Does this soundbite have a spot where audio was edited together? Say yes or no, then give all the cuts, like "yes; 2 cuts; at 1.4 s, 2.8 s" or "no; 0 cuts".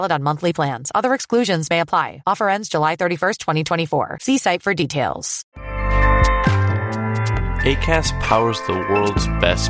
yes; 2 cuts; at 5.3 s, 6.9 s